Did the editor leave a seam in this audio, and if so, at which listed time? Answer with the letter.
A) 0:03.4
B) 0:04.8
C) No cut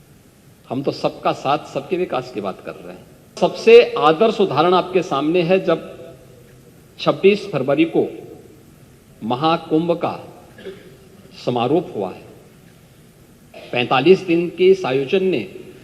A